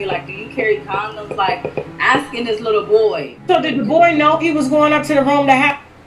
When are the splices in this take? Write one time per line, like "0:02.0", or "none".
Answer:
0:03.3